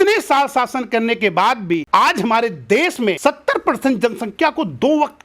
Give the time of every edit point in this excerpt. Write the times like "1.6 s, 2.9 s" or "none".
1.8 s, 3.2 s

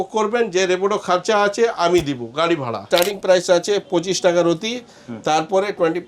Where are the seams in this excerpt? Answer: 2.8 s

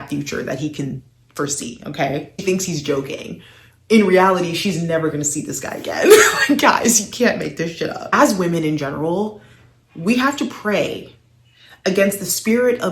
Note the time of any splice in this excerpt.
2.4 s, 8.1 s

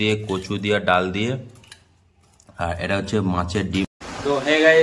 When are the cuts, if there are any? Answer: 3.9 s

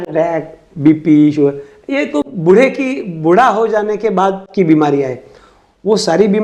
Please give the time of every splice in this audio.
none

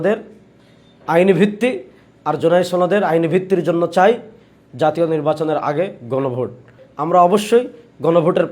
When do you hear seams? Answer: 6.8 s

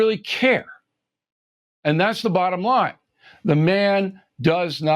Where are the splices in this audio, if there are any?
none

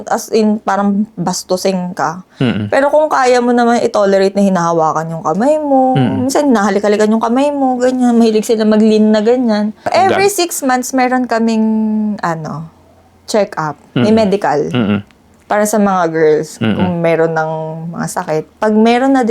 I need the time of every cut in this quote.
9.9 s

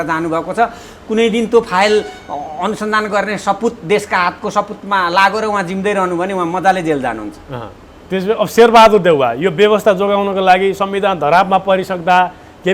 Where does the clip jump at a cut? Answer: none

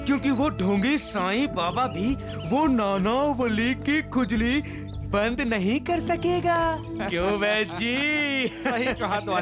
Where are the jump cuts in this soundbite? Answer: none

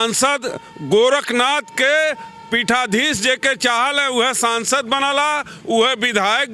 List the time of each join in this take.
none

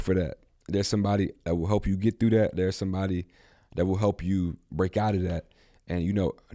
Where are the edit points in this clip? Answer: none

